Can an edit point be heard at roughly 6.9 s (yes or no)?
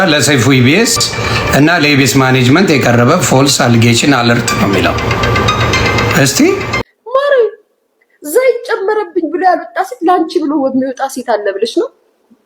yes